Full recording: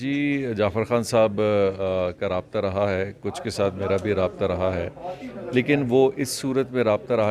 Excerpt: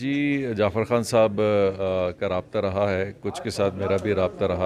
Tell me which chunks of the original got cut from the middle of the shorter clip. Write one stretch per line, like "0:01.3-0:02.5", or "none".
none